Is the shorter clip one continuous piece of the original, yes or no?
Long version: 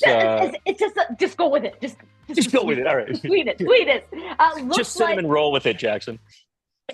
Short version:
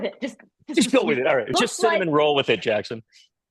no